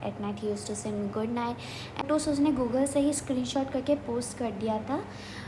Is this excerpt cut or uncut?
cut